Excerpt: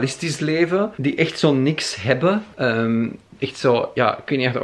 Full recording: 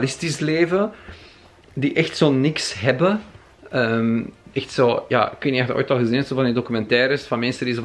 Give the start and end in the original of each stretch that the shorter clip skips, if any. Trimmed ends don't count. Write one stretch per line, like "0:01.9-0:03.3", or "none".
0:00.9-0:01.7
0:03.3-0:03.6